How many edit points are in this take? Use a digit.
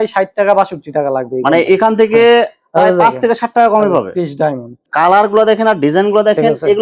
1